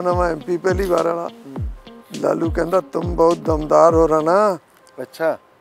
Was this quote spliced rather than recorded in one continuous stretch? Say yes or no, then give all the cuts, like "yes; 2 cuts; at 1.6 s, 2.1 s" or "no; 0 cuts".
no; 0 cuts